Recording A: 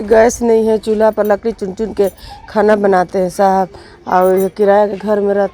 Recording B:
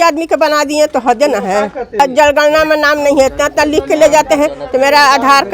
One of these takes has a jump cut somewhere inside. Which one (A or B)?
B